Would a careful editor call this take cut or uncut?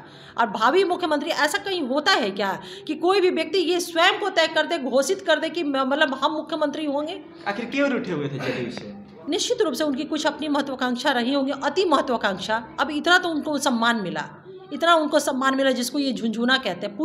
uncut